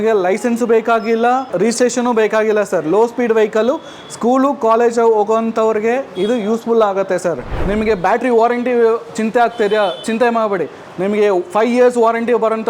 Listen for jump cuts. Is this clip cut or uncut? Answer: cut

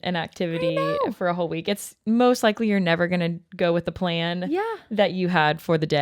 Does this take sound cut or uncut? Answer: uncut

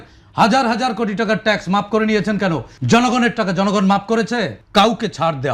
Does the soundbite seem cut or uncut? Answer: cut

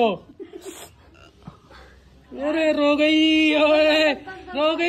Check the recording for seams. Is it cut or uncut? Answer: uncut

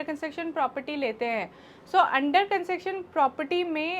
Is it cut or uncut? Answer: uncut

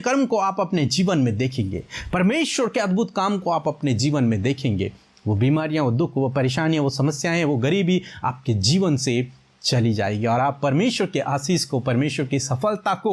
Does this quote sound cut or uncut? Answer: uncut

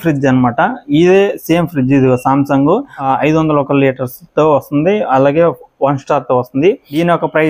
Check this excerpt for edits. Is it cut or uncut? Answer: uncut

